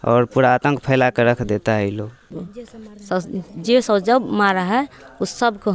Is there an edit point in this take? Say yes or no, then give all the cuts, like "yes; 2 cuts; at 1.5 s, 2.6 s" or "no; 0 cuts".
yes; 1 cut; at 2.2 s